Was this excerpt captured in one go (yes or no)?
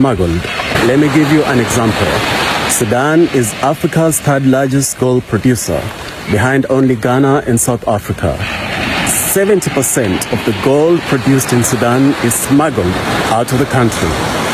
yes